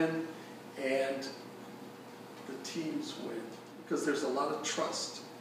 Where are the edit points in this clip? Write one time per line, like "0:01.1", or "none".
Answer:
0:03.7